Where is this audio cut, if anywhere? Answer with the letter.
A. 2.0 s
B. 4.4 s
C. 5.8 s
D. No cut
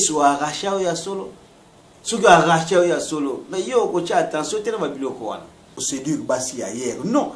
C